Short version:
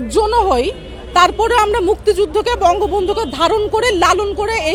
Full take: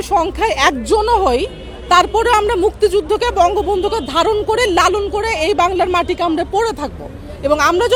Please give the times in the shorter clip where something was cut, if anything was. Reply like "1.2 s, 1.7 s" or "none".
none